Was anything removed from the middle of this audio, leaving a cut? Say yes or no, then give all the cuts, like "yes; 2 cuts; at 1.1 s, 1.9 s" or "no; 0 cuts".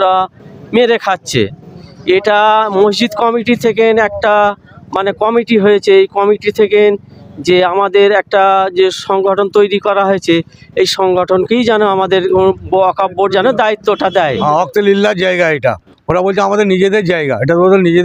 no; 0 cuts